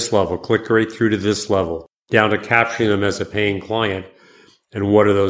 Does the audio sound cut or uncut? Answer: cut